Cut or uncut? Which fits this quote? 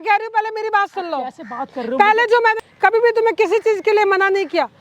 cut